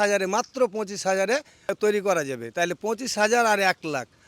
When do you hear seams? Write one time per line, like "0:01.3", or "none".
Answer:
0:01.7